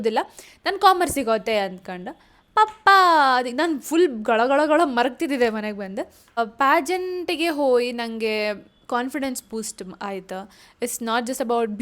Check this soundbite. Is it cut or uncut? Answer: cut